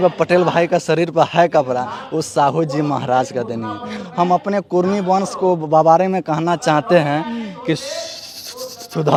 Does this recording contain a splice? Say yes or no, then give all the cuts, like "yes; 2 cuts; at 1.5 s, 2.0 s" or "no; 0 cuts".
no; 0 cuts